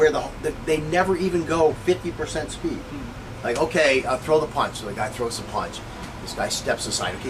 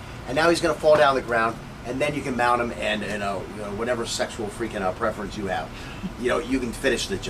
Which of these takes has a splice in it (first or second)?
first